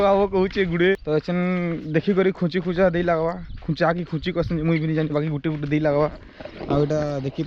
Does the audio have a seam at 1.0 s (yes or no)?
yes